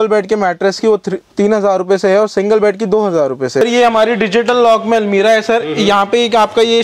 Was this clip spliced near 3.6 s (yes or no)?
yes